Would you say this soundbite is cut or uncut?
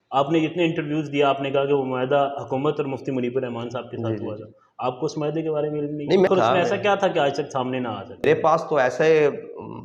cut